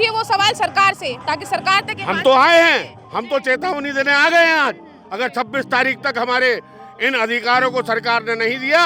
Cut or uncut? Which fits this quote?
uncut